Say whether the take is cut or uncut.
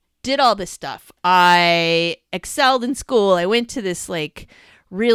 uncut